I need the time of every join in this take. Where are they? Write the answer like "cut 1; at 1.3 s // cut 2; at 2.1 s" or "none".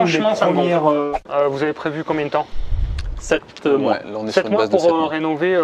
cut 1; at 1.0 s